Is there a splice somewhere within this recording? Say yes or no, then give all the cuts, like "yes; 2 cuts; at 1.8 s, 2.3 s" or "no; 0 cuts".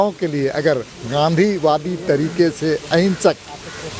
no; 0 cuts